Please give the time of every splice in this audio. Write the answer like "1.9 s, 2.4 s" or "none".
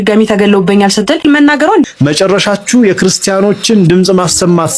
1.8 s